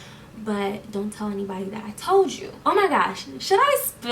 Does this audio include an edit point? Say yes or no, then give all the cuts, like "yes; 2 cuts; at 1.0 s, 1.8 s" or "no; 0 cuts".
yes; 1 cut; at 2.5 s